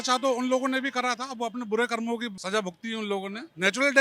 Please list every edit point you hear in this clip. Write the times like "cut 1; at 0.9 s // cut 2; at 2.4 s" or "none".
cut 1; at 2.4 s